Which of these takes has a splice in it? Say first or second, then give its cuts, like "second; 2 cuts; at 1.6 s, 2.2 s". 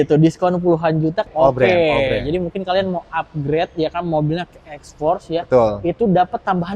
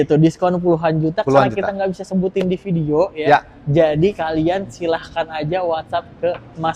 first; 1 cut; at 1.2 s